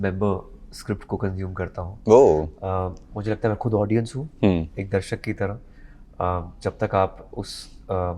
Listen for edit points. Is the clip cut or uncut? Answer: uncut